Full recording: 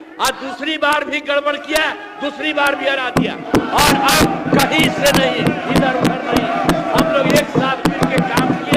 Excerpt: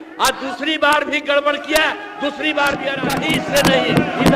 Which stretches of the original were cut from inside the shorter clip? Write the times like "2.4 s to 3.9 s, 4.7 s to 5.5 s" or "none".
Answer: 3.1 s to 4.6 s